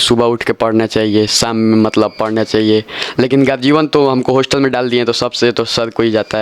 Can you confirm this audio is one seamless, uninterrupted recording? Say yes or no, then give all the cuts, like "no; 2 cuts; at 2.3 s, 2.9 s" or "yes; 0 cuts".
yes; 0 cuts